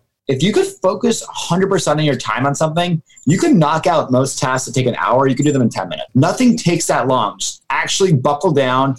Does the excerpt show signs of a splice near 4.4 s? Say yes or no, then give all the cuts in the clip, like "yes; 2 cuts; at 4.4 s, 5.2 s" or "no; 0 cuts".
no; 1 cut; at 6.0 s